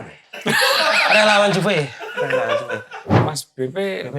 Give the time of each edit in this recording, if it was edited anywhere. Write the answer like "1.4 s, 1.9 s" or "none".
3.0 s